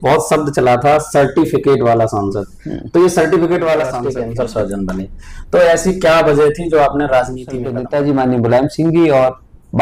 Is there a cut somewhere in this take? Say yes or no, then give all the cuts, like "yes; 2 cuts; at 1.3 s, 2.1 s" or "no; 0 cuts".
yes; 2 cuts; at 4.0 s, 7.8 s